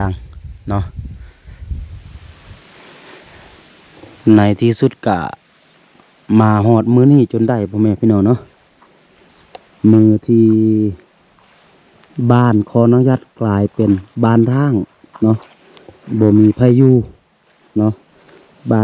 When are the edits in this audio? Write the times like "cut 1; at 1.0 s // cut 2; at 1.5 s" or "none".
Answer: cut 1; at 2.1 s